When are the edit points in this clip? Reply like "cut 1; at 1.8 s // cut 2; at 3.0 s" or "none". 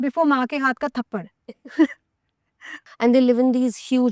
cut 1; at 2.8 s